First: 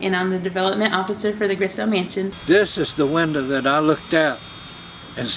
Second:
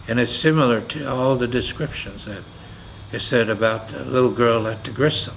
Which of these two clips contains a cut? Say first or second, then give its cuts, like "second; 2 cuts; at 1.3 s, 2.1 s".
first; 1 cut; at 2.4 s